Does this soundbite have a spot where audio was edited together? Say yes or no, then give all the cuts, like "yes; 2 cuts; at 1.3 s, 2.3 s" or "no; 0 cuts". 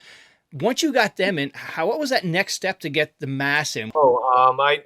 yes; 1 cut; at 3.9 s